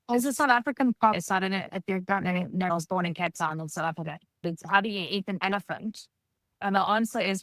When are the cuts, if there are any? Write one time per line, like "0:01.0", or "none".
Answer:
0:01.1
0:02.7
0:04.5